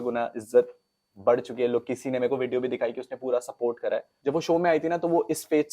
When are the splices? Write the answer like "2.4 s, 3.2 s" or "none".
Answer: 4.1 s